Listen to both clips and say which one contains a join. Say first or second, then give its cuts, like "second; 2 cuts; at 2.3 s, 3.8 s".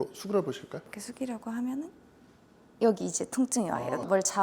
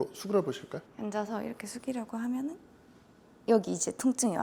first; 1 cut; at 0.9 s